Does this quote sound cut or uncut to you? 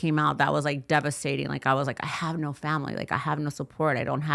uncut